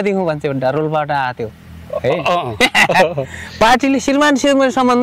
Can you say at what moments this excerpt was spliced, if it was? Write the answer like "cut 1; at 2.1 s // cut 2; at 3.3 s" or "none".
none